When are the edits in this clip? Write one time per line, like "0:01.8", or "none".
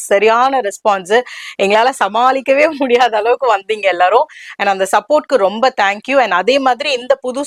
none